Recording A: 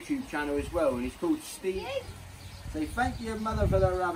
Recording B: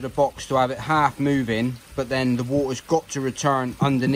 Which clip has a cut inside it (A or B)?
A